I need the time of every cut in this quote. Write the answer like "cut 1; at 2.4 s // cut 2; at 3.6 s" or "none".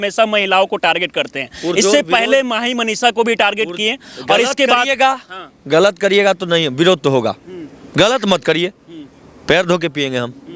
none